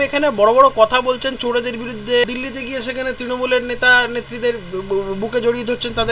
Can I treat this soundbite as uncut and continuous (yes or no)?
no